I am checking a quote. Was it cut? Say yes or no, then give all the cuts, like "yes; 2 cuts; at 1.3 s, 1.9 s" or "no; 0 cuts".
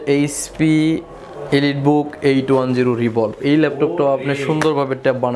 no; 0 cuts